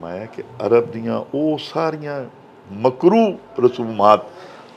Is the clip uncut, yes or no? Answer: yes